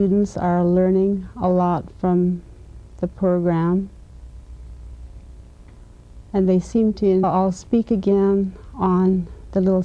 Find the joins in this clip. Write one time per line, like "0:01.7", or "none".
none

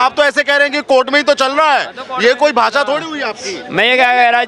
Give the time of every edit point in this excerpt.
none

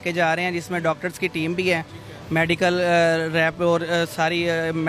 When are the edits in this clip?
none

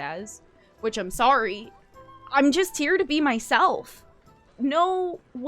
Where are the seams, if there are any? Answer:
0:04.4

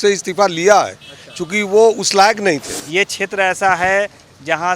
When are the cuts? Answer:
0:02.8

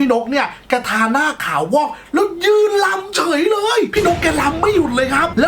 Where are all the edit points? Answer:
0:03.9

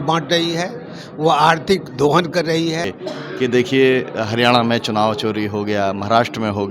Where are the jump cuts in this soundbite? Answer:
0:03.0

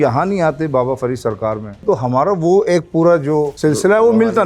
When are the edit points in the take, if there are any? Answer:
0:01.8
0:03.5

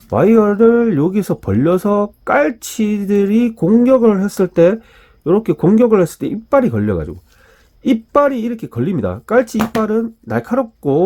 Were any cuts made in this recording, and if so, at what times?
none

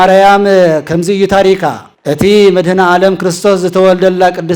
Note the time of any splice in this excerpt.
0:01.9

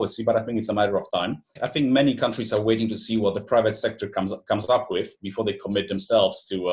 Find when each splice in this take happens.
0:01.6

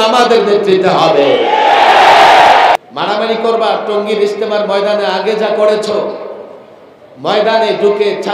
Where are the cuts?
0:02.8

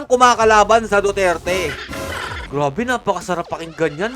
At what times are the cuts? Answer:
0:02.3

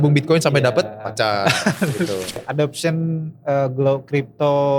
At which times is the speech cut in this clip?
0:02.4

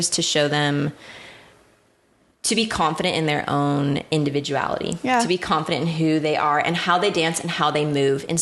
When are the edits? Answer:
none

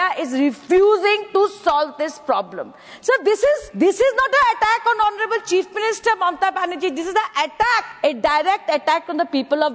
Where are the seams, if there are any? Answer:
0:03.7
0:07.9

